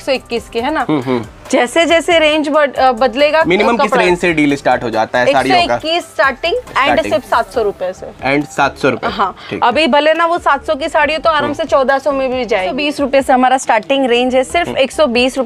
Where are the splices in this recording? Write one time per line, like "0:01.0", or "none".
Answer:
0:12.8